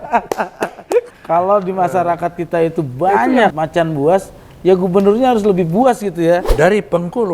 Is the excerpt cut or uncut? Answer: cut